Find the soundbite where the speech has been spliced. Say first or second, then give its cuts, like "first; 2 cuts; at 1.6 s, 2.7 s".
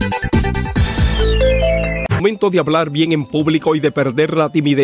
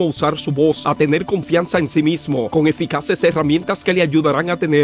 first; 1 cut; at 2.1 s